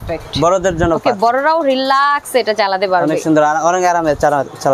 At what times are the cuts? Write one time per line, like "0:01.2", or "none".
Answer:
none